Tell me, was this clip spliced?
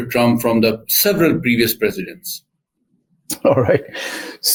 no; 0 cuts

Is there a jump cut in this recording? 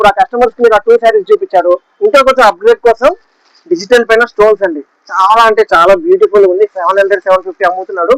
no; 0 cuts

